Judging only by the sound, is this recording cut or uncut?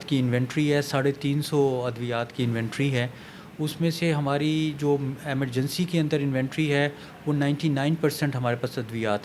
uncut